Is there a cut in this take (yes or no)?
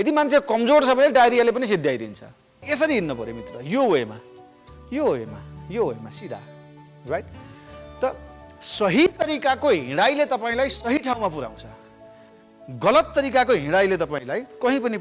yes